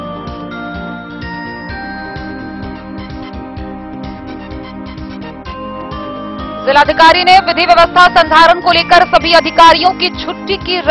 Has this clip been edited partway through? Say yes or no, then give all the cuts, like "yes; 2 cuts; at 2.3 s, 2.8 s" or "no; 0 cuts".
yes; 2 cuts; at 4.6 s, 6.6 s